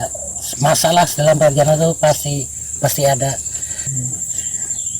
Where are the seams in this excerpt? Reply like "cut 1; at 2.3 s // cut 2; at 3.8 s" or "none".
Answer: cut 1; at 3.9 s